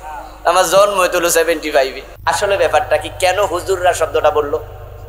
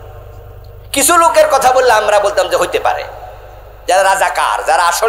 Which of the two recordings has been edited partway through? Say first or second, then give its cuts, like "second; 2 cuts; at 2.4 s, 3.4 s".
first; 1 cut; at 2.1 s